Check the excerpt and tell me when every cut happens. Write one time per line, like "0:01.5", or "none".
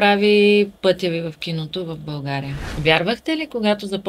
0:02.6